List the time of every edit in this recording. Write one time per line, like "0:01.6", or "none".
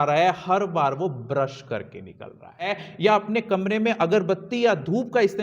0:02.8